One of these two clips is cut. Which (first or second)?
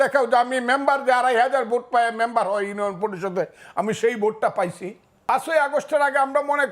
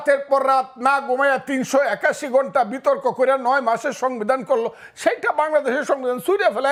first